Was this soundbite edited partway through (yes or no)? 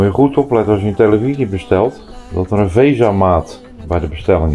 no